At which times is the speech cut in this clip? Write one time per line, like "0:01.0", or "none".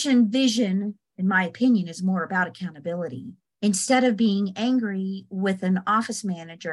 0:03.4